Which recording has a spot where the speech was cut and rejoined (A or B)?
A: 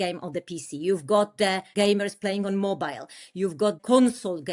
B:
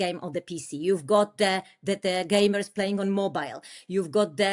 A